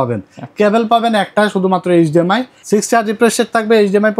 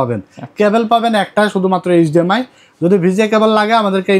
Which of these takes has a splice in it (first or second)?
first